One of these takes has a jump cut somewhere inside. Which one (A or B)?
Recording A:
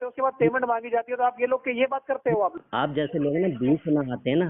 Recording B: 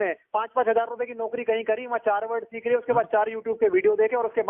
A